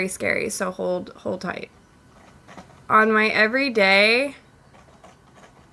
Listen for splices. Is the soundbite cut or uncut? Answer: uncut